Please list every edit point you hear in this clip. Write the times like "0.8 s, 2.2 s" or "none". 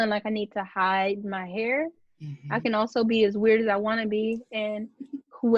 none